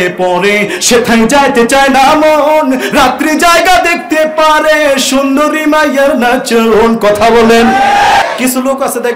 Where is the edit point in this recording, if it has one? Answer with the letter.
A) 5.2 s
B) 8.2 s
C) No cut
B